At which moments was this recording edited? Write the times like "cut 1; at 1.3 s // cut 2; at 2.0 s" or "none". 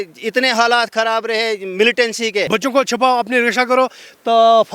cut 1; at 2.5 s